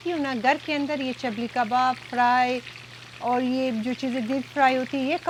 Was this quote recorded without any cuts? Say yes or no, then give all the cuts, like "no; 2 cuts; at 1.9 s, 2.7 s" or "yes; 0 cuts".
yes; 0 cuts